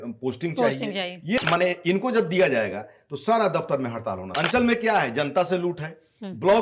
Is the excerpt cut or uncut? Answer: cut